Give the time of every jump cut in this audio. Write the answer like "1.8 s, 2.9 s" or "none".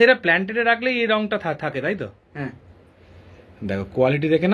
none